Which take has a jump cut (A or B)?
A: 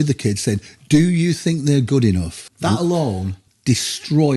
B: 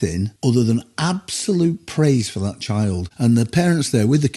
B